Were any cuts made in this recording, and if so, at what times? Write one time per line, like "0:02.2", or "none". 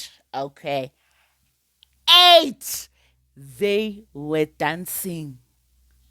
none